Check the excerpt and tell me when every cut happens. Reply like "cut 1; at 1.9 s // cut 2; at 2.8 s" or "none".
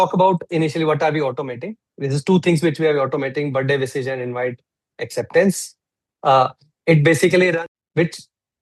cut 1; at 7.6 s